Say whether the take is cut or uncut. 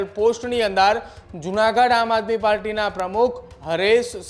uncut